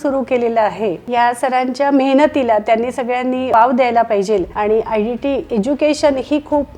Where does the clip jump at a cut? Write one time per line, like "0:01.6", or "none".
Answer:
none